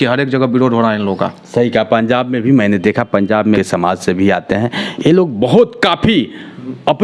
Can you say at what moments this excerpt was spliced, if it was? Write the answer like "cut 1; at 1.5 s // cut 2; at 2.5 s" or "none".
none